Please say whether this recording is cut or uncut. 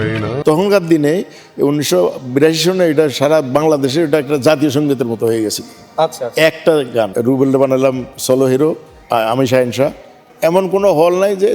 cut